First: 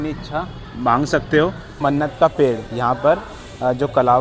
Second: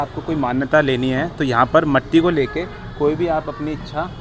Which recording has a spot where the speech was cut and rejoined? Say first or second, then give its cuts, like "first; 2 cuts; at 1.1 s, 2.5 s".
first; 1 cut; at 1.8 s